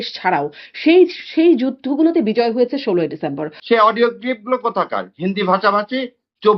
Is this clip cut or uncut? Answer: cut